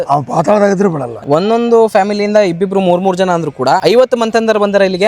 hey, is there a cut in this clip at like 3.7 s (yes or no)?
no